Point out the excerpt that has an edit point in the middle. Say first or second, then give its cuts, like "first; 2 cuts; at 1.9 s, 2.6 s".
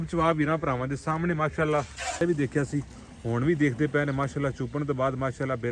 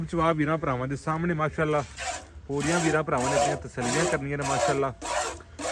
first; 1 cut; at 2.2 s